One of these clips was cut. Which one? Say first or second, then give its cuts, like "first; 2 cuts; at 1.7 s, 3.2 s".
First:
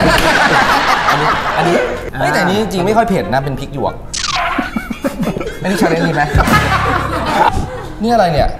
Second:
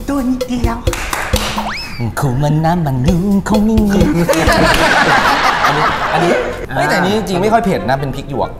first; 1 cut; at 7.5 s